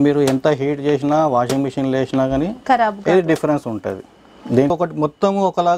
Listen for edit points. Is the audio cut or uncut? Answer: cut